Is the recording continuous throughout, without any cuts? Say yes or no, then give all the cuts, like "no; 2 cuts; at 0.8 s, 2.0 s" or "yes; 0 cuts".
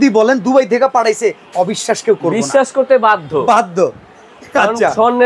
yes; 0 cuts